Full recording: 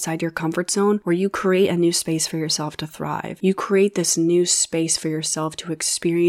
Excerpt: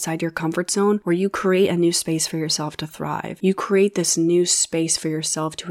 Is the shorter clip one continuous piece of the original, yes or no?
yes